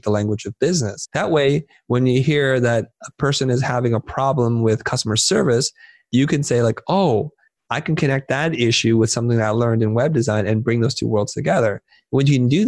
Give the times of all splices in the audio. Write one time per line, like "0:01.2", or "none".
0:01.0